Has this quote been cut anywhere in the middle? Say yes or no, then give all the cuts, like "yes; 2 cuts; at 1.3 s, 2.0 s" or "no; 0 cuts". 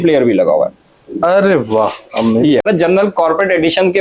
yes; 1 cut; at 2.6 s